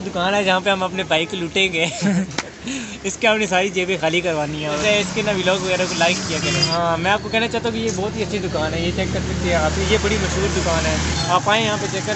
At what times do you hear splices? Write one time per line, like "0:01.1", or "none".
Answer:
none